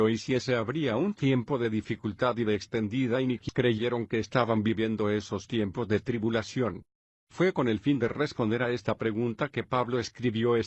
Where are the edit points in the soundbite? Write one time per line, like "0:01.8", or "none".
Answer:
none